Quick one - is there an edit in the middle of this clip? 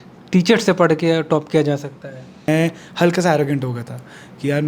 yes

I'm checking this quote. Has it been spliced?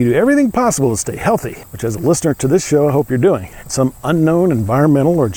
yes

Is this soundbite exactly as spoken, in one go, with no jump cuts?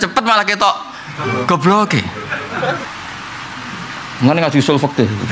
no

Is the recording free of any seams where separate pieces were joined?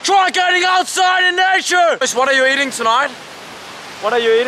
no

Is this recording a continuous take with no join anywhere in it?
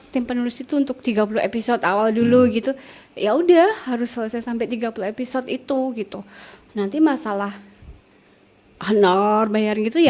yes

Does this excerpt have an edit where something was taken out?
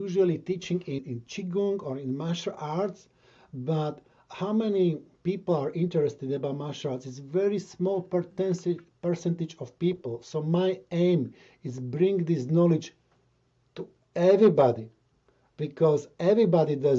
yes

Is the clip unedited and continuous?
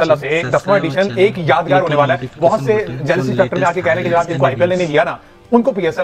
yes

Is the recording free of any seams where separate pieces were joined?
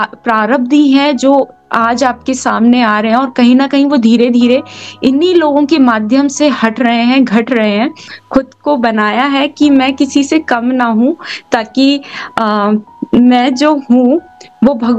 no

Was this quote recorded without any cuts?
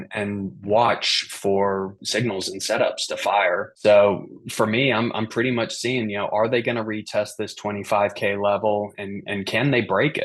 no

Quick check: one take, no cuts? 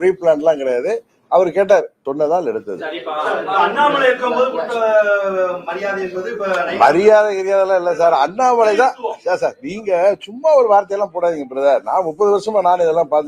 no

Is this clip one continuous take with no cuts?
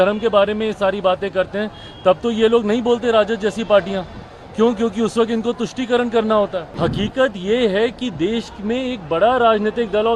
no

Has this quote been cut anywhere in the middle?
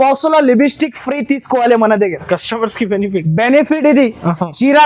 no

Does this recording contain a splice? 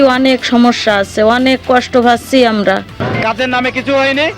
yes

